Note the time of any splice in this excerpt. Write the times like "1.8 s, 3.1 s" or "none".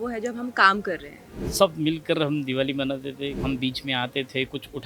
1.5 s, 3.4 s